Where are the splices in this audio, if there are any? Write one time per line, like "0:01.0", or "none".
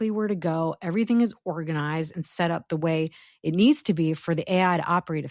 none